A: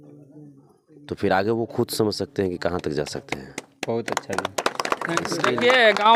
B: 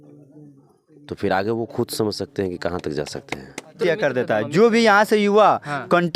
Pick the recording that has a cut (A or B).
B